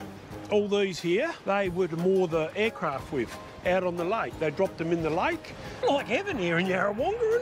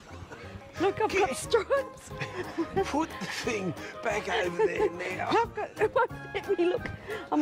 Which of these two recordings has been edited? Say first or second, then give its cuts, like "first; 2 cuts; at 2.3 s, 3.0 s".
first; 2 cuts; at 1.4 s, 5.7 s